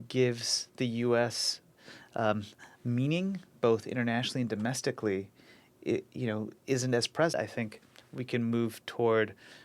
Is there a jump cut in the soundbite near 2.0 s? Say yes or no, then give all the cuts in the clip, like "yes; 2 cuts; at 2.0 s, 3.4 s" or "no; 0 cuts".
no; 1 cut; at 7.3 s